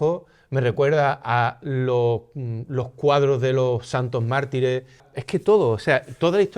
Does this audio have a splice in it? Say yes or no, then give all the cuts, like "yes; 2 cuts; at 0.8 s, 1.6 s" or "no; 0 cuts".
yes; 1 cut; at 5.1 s